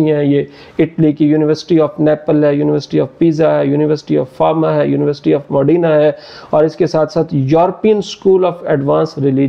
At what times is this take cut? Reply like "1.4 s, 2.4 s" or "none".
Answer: none